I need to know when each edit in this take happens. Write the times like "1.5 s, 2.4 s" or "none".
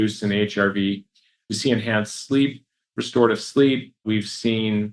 1.5 s, 4.0 s